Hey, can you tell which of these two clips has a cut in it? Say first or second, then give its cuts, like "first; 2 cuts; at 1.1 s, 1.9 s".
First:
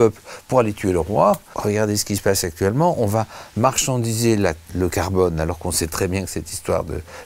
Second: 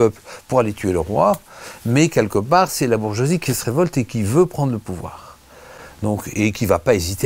first; 1 cut; at 1.5 s